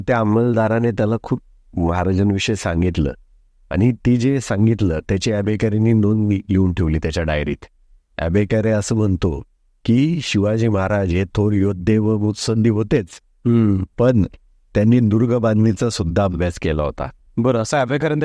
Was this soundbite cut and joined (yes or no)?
no